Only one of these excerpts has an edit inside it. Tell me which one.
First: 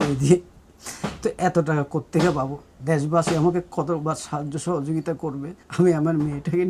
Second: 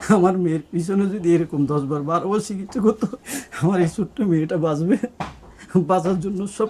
first; 1 cut; at 5.6 s

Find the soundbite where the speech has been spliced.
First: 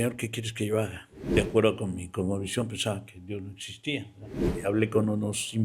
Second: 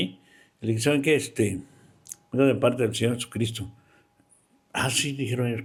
first; 2 cuts; at 1.2 s, 4.4 s

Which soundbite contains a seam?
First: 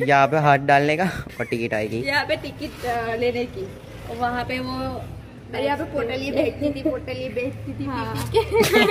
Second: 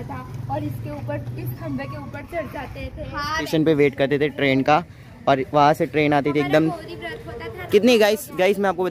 second; 1 cut; at 3.3 s

